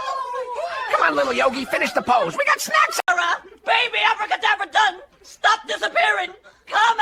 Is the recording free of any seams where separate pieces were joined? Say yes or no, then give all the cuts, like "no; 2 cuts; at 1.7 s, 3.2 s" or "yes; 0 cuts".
yes; 0 cuts